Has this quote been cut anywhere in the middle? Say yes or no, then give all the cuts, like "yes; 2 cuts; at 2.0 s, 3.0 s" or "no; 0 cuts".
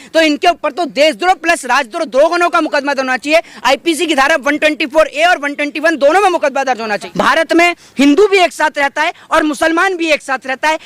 yes; 1 cut; at 7.0 s